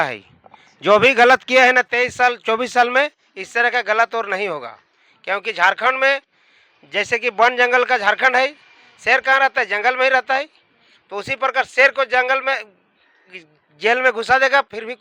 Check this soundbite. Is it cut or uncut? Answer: uncut